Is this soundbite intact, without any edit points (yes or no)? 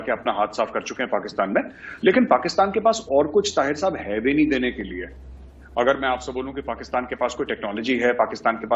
yes